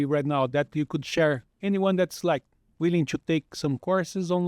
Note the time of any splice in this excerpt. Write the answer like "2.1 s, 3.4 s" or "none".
1.5 s